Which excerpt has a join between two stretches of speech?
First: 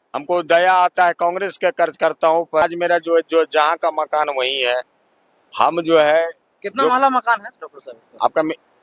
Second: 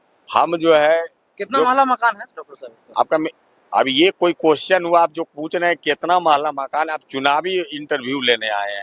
first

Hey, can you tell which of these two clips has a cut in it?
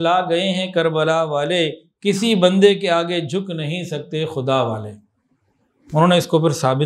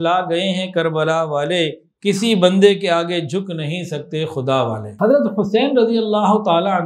second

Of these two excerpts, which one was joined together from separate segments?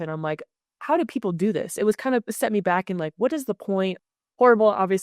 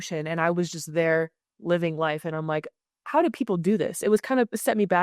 first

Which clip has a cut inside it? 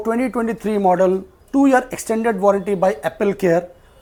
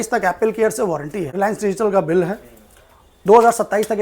second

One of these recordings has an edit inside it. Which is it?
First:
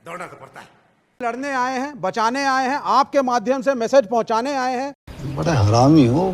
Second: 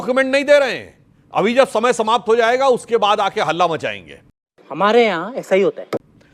first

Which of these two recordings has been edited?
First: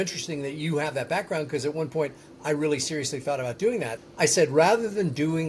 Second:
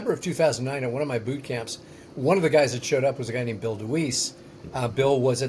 first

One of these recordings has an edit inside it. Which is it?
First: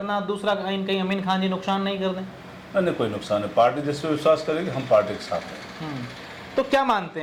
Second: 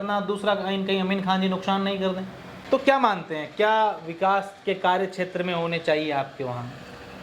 second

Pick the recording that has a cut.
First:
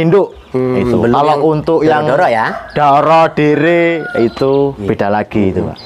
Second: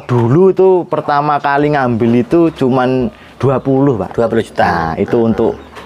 first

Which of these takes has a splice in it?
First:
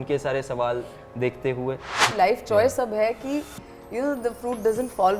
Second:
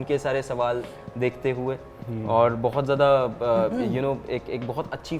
first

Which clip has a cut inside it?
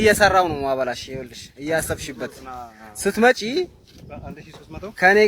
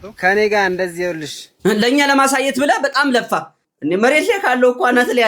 second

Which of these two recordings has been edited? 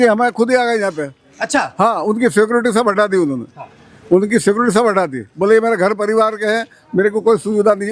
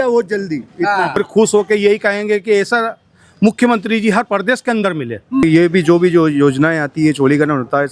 second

